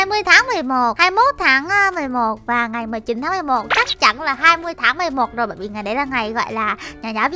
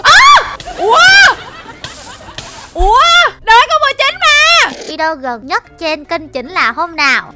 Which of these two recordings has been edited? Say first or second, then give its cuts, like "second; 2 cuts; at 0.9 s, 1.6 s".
second; 1 cut; at 4.9 s